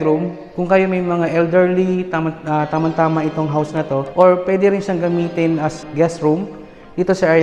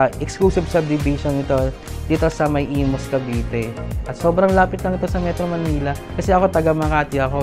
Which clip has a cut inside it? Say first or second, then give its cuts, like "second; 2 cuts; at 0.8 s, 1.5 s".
first; 2 cuts; at 4.1 s, 5.8 s